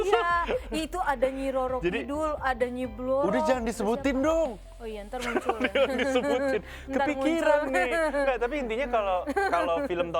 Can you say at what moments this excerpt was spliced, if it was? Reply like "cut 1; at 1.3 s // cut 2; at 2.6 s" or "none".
none